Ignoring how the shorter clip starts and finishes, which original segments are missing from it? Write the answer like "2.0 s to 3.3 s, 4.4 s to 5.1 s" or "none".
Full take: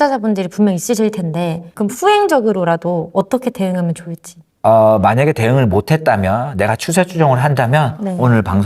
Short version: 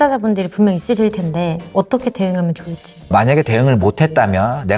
1.7 s to 3.1 s, 4.5 s to 5.0 s